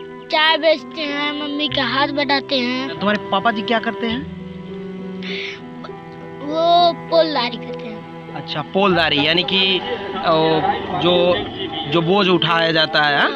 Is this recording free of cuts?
no; 1 cut; at 3.0 s

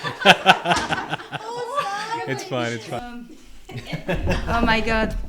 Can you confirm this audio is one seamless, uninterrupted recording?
no; 1 cut; at 3.0 s

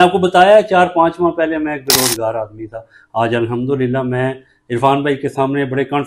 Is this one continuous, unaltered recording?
yes; 0 cuts

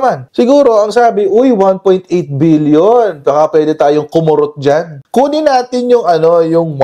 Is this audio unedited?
yes; 0 cuts

